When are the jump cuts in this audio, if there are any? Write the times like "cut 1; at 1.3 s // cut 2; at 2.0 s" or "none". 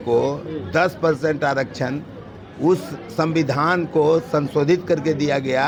none